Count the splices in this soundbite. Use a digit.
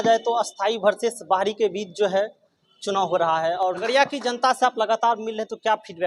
1